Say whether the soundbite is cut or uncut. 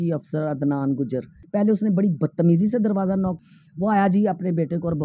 cut